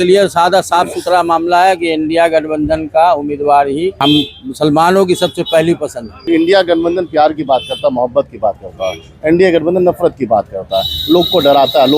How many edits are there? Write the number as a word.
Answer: two